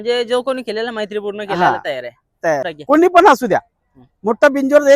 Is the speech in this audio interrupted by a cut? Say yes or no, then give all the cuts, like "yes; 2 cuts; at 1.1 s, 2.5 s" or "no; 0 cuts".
yes; 1 cut; at 2.7 s